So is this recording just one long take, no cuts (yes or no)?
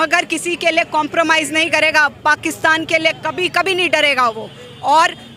yes